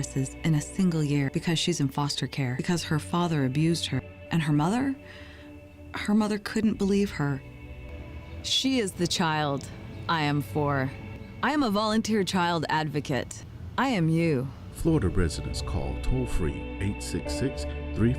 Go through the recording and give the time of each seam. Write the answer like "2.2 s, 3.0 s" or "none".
2.6 s, 4.1 s